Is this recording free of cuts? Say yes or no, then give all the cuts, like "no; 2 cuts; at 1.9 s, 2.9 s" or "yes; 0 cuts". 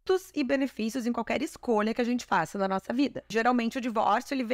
no; 1 cut; at 3.3 s